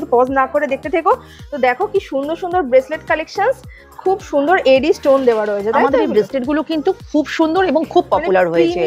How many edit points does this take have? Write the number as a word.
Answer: zero